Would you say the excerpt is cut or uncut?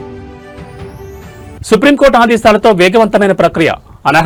uncut